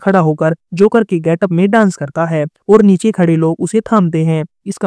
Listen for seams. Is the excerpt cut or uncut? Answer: uncut